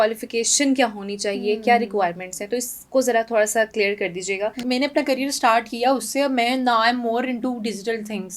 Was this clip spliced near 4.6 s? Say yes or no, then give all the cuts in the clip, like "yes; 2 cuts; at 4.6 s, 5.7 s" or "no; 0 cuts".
yes; 1 cut; at 4.6 s